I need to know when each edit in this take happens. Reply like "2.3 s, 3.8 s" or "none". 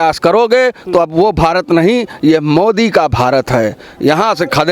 none